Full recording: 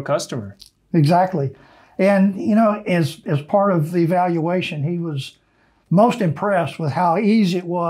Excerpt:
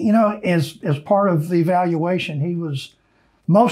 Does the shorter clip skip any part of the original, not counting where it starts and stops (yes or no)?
no